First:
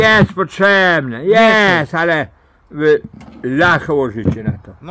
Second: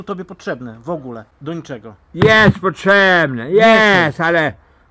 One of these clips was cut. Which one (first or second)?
second